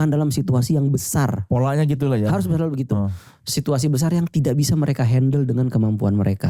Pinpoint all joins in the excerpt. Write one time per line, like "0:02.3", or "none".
none